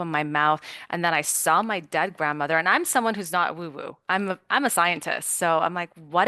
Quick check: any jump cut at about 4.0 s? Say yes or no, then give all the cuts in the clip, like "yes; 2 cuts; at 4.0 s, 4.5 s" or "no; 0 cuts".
no; 0 cuts